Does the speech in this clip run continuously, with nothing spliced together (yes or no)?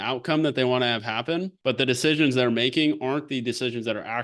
no